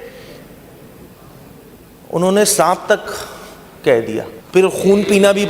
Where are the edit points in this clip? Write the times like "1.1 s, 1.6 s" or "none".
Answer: 4.4 s